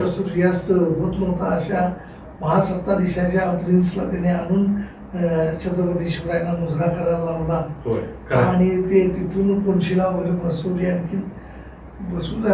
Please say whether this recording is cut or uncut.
uncut